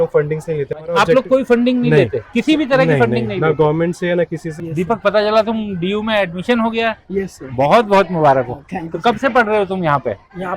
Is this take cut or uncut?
cut